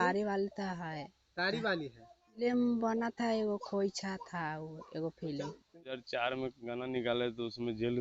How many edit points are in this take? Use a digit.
2